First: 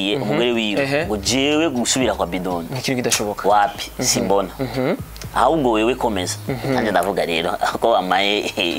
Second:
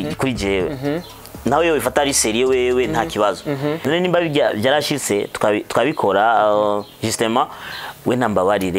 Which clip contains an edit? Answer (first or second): second